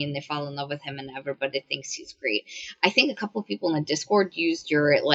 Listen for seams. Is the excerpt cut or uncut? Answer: uncut